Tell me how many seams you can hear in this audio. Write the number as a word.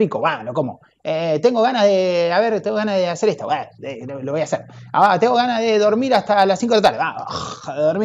zero